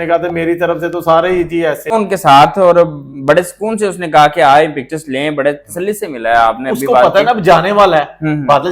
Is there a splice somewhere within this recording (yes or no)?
yes